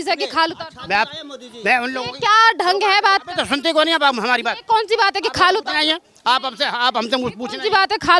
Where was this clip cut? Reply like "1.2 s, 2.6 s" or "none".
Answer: none